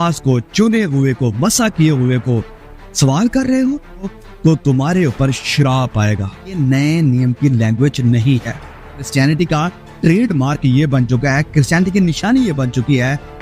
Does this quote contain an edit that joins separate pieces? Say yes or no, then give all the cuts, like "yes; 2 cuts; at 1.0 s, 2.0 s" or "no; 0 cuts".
yes; 3 cuts; at 4.1 s, 6.6 s, 9.1 s